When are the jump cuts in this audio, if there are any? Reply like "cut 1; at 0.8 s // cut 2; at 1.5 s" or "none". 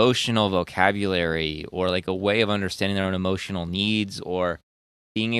none